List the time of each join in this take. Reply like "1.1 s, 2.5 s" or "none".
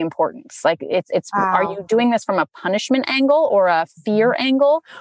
none